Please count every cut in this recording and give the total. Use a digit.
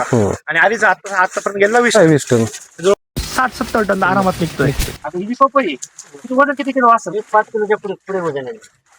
1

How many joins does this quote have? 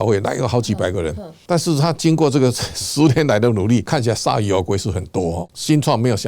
1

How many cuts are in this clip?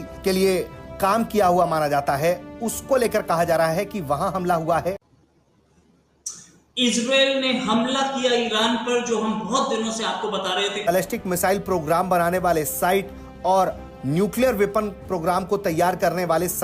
2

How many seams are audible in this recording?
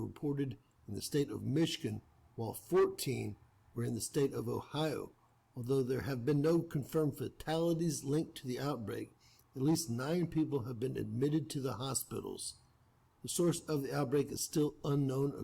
2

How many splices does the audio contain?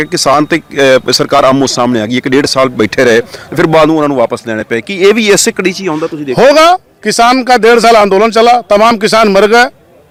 0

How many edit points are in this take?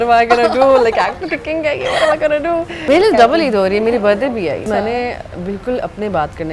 2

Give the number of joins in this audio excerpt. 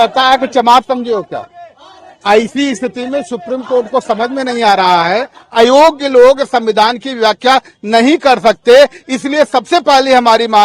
1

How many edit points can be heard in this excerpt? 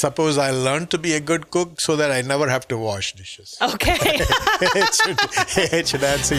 0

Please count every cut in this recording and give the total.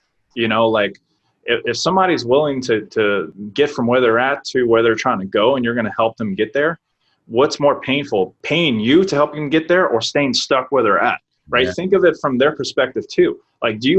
2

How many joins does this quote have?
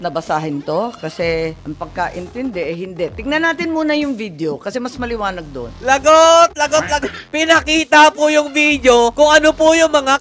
3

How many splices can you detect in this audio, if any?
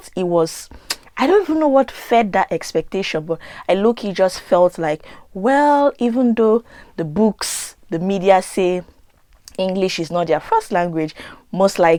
0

